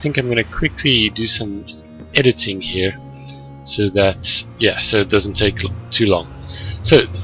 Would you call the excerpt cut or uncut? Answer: uncut